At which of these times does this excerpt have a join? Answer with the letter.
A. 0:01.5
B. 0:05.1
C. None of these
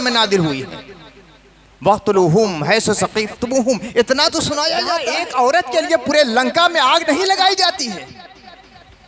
B